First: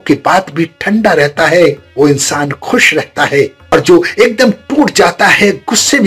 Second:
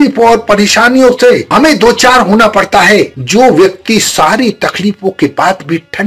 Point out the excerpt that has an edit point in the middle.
second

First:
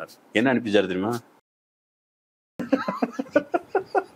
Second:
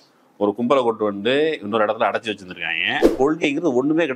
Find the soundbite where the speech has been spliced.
second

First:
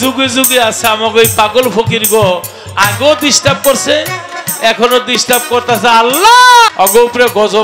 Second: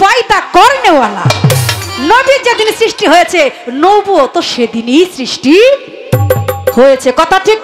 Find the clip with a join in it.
first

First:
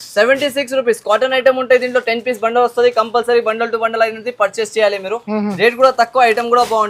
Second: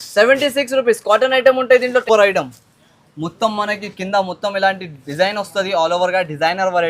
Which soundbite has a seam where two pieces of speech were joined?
second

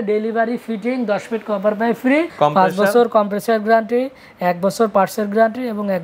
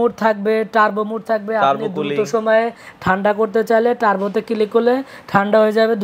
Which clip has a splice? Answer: first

